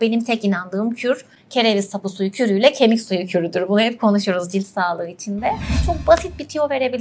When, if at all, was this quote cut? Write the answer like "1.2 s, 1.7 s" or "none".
5.8 s

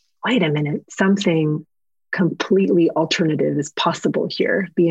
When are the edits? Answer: none

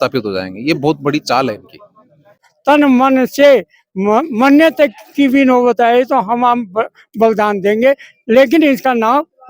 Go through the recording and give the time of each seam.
2.4 s

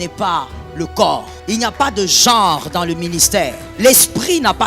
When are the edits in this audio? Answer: 1.3 s, 3.6 s

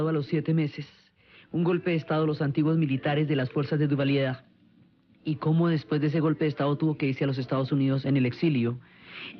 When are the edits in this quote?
2.2 s

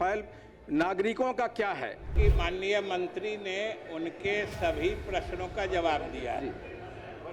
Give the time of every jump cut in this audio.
2.1 s

